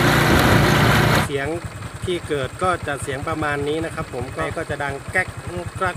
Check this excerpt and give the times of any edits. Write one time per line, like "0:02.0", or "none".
0:01.2
0:04.4